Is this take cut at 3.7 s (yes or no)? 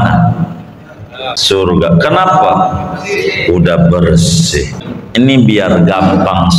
no